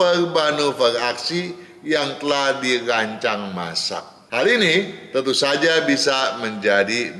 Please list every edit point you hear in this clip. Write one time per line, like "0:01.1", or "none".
0:04.1